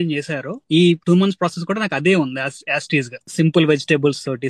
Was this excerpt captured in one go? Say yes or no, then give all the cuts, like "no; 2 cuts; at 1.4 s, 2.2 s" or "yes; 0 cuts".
no; 2 cuts; at 1.0 s, 3.2 s